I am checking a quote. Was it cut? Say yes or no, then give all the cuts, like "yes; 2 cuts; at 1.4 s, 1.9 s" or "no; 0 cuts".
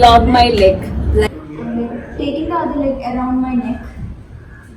yes; 1 cut; at 1.3 s